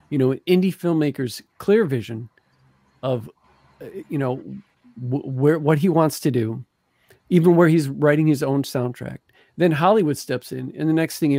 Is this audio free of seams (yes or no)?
no